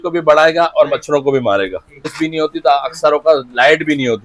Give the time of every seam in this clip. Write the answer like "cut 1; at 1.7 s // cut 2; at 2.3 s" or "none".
cut 1; at 2.1 s